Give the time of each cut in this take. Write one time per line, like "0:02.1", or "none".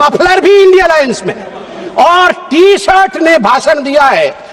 none